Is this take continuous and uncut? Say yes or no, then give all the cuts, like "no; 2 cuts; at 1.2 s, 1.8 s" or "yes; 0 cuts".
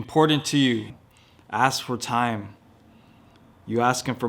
no; 1 cut; at 1.0 s